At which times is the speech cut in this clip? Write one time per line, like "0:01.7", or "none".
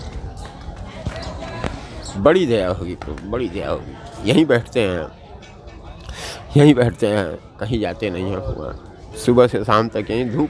0:02.0